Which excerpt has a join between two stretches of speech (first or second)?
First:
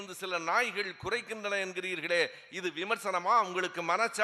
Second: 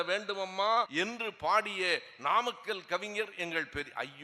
second